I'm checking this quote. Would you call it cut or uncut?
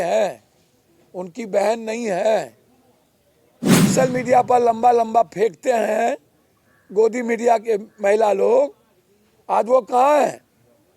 cut